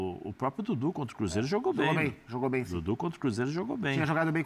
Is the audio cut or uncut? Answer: uncut